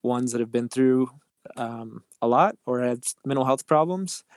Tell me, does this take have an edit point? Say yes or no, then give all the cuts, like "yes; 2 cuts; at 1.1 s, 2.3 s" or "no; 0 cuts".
no; 0 cuts